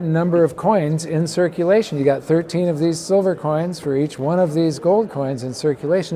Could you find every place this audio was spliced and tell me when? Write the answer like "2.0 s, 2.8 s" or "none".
none